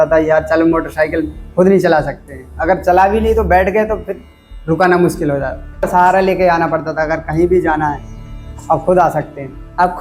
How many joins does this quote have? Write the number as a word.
one